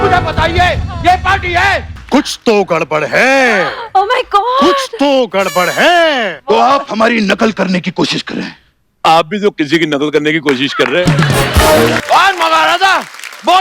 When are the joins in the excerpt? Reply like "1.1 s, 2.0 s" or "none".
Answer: 1.9 s, 6.4 s, 12.0 s